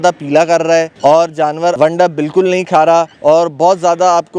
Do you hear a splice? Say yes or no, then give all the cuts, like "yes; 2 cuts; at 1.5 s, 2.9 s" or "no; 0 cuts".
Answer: yes; 3 cuts; at 0.9 s, 1.8 s, 3.1 s